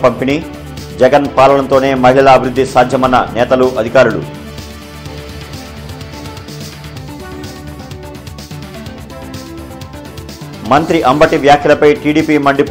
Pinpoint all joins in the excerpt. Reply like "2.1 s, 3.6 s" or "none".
none